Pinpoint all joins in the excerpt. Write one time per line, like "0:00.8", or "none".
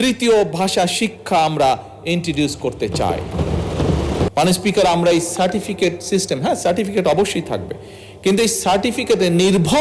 0:04.3